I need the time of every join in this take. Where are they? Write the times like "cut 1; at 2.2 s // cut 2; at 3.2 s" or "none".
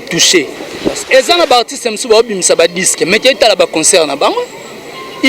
cut 1; at 1.0 s